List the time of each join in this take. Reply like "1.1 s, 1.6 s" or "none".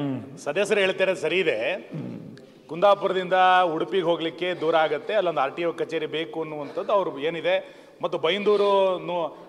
none